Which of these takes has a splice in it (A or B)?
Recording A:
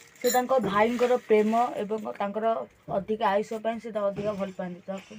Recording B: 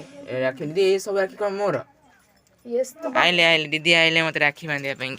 B